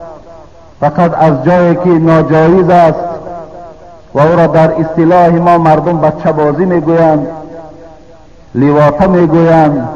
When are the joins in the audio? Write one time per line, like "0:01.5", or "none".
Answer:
none

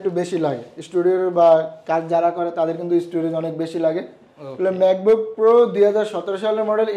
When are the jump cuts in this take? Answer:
none

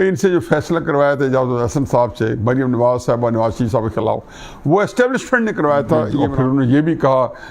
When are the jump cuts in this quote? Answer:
0:06.2

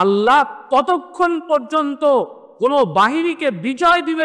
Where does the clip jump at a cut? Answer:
0:02.4

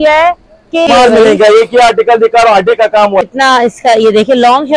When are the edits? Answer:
0:00.9
0:03.3

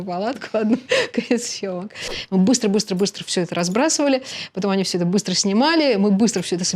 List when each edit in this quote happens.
0:02.0

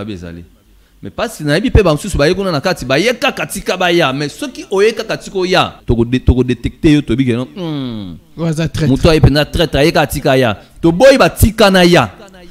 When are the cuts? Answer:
0:05.8

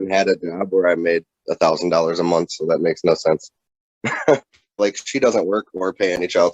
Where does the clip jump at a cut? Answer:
0:04.8

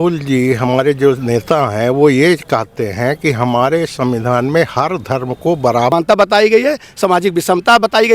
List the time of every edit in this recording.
0:05.9

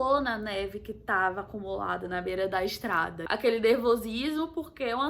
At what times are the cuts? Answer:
0:03.2

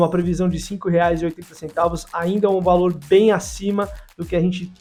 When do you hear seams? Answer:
none

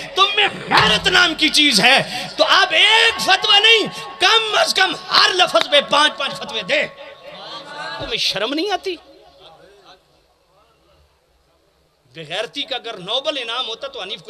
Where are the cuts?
0:08.1

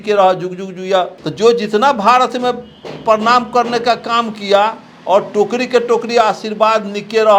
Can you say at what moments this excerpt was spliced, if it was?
0:01.2

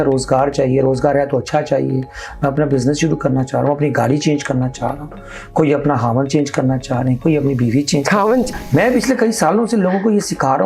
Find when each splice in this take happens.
0:08.5

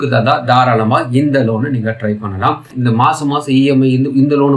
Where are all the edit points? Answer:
0:02.7

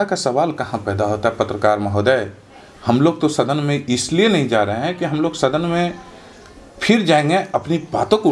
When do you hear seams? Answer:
none

